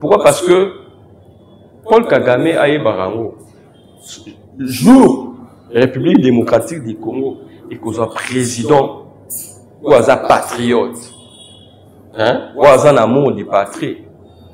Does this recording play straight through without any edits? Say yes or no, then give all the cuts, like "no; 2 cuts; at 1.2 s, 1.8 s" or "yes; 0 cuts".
yes; 0 cuts